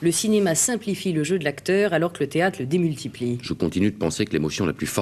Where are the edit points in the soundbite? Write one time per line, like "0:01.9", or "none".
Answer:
0:03.4